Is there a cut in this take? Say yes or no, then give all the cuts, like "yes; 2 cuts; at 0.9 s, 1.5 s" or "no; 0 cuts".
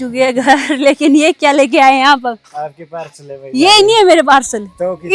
no; 0 cuts